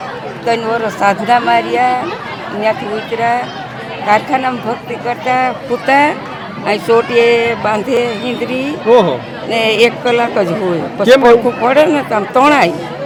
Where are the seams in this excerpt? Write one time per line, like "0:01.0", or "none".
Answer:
none